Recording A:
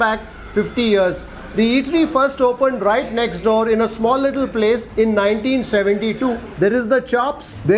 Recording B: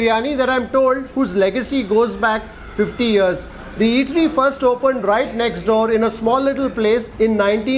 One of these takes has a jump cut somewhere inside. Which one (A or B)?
A